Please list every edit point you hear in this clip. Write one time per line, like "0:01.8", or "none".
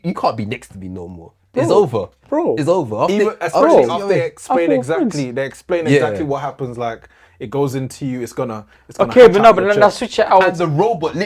none